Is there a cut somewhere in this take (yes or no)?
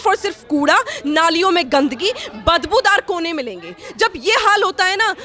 no